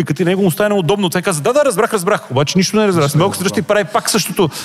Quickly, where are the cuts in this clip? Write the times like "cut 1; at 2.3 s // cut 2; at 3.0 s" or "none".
none